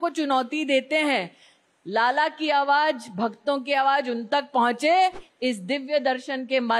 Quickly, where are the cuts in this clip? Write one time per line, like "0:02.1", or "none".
0:05.2